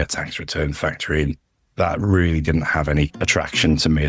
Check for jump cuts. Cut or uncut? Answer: cut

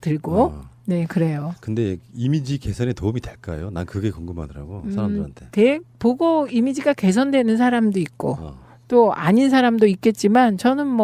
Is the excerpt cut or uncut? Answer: cut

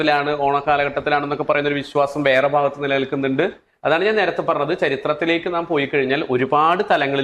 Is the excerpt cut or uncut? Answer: cut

